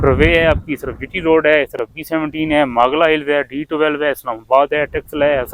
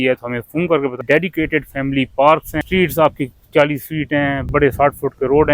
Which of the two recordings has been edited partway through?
second; 2 cuts; at 1.0 s, 2.5 s

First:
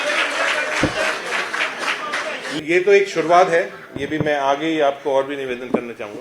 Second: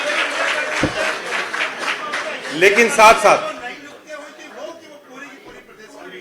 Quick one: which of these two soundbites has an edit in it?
first; 1 cut; at 2.6 s

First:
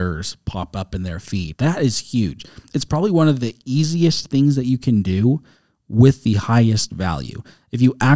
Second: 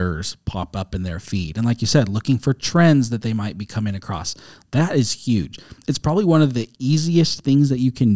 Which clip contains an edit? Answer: first; 1 cut; at 1.5 s

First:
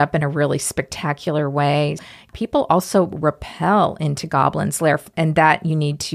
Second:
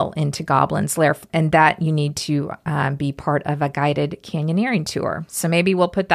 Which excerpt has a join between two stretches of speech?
first; 1 cut; at 2.1 s

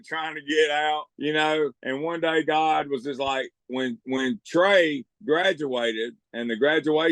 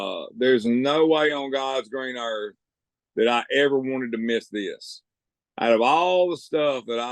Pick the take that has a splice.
first; 5 cuts; at 1.1 s, 1.8 s, 3.6 s, 5.1 s, 6.2 s

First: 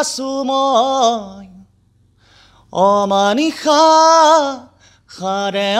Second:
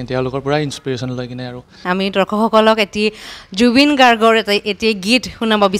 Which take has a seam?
second; 1 cut; at 1.8 s

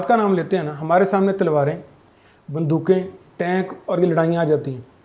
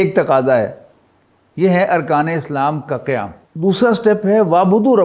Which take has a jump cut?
second; 1 cut; at 3.4 s

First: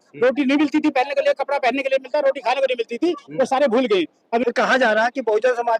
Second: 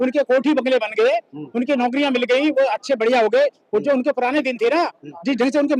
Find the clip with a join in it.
first; 1 cut; at 4.4 s

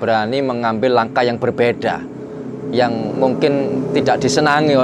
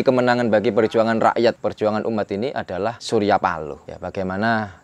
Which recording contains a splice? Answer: second; 3 cuts; at 1.6 s, 3.0 s, 3.9 s

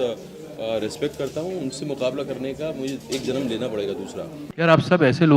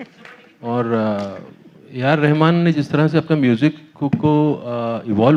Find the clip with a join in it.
first; 1 cut; at 4.4 s

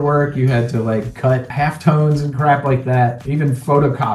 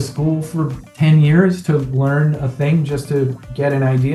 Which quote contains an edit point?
first; 2 cuts; at 1.5 s, 3.2 s

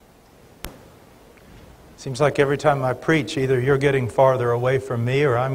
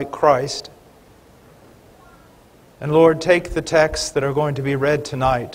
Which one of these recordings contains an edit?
second; 1 cut; at 4.2 s

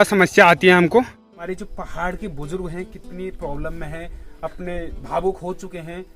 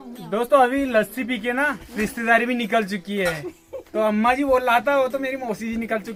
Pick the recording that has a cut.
first; 1 cut; at 1.1 s

